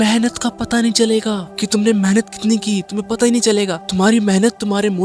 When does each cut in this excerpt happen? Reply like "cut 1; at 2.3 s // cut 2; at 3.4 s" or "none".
cut 1; at 1.5 s // cut 2; at 3.8 s